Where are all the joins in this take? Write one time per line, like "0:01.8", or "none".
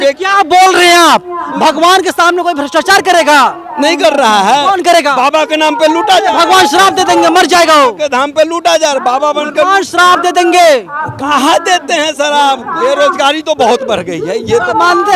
0:12.7